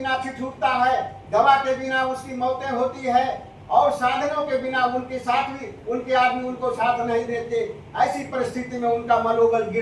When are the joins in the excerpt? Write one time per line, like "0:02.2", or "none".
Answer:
none

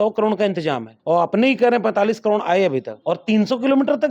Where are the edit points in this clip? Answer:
0:00.9
0:02.9

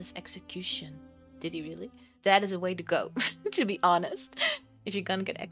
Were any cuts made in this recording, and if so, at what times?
0:02.0

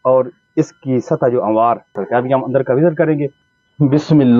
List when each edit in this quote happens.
0:02.0
0:03.4

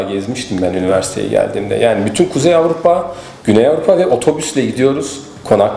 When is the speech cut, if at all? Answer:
none

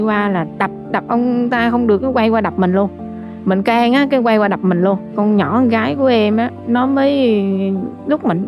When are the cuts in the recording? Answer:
none

